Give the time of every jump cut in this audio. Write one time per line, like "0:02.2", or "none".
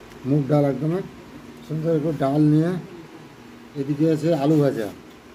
none